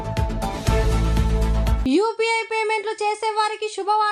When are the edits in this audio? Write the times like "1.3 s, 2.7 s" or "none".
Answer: none